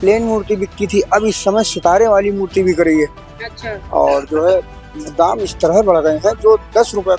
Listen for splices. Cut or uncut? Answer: uncut